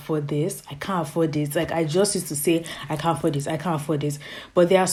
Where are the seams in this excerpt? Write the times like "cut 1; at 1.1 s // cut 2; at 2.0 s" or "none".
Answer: none